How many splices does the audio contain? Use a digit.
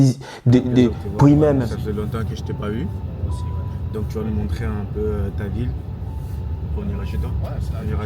1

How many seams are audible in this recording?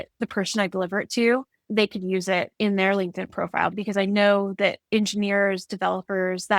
4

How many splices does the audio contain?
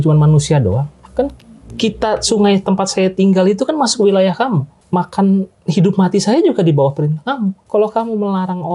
2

